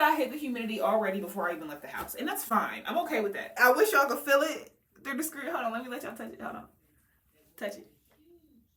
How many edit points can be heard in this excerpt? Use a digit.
0